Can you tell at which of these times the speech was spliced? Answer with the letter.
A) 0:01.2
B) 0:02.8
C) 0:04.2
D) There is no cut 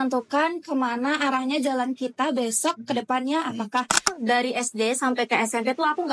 C